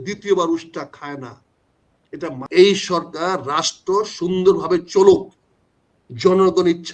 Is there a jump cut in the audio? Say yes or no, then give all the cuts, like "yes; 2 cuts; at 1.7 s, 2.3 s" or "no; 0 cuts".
yes; 1 cut; at 2.4 s